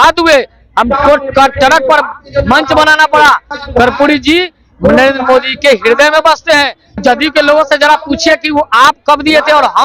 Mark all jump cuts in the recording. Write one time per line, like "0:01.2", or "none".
0:03.5
0:07.0